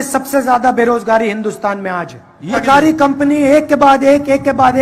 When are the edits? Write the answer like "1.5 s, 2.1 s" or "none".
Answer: none